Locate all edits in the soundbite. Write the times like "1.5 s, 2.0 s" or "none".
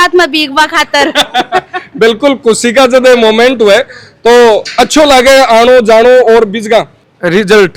none